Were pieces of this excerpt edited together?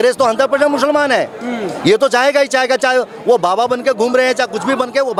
no; 0 cuts

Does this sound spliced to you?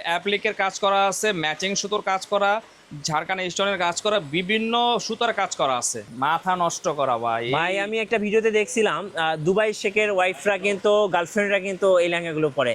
yes; 1 cut; at 6.0 s

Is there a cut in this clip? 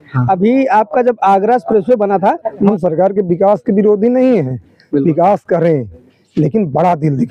yes; 1 cut; at 2.7 s

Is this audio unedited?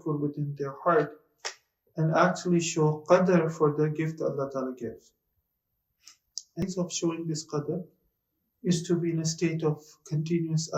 no; 1 cut; at 6.6 s

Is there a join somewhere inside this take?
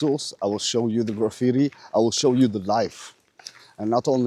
no; 0 cuts

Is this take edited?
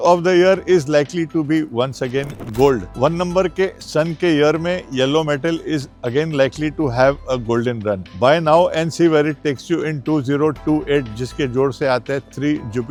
no; 0 cuts

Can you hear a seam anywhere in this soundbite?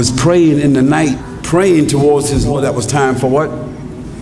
yes; 2 cuts; at 1.3 s, 2.5 s

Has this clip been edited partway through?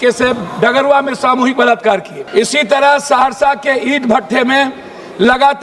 yes; 1 cut; at 2.2 s

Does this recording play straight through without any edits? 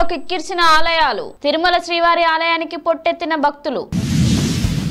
yes; 0 cuts

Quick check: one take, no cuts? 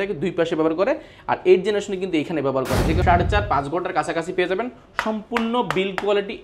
no; 1 cut; at 3.0 s

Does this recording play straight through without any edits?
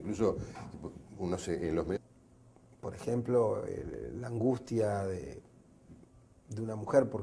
yes; 0 cuts

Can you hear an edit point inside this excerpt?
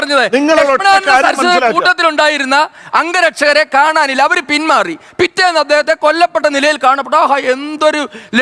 no; 0 cuts

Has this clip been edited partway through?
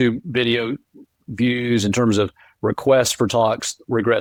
no; 0 cuts

